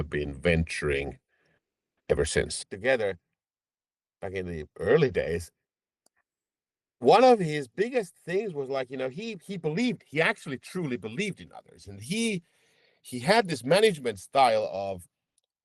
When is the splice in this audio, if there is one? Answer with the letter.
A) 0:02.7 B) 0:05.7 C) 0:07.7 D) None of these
A